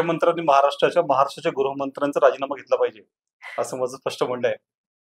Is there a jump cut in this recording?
no; 0 cuts

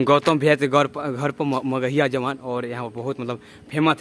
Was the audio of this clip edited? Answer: no; 0 cuts

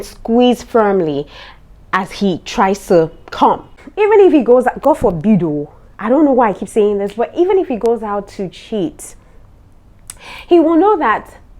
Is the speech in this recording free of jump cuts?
no; 1 cut; at 3.7 s

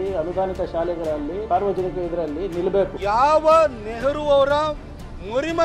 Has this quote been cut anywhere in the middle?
yes; 2 cuts; at 1.4 s, 2.9 s

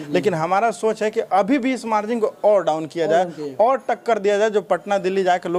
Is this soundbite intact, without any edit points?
yes; 0 cuts

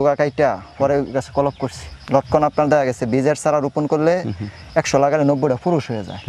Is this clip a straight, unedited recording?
yes; 0 cuts

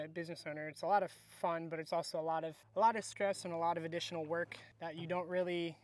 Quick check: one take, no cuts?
yes; 0 cuts

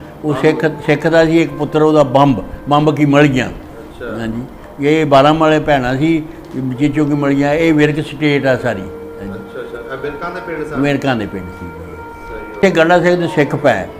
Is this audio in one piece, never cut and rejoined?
no; 1 cut; at 12.6 s

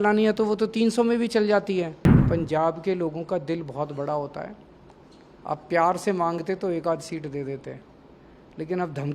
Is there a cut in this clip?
yes; 1 cut; at 2.1 s

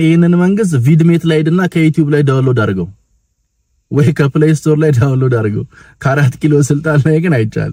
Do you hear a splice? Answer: no; 0 cuts

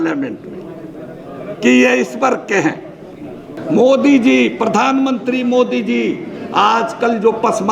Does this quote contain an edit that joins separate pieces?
yes; 1 cut; at 3.5 s

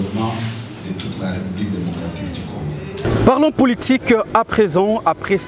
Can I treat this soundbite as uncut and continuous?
yes; 0 cuts

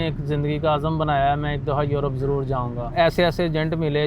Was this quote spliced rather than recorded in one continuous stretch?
yes; 1 cut; at 2.9 s

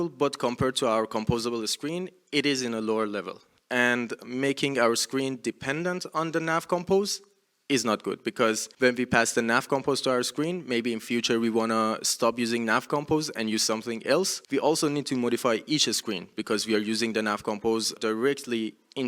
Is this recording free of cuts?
no; 3 cuts; at 8.7 s, 14.4 s, 17.9 s

